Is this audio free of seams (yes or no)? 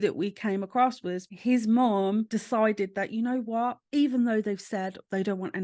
no